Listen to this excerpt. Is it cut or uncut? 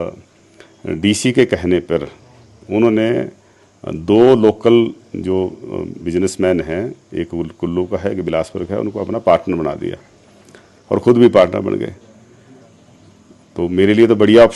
uncut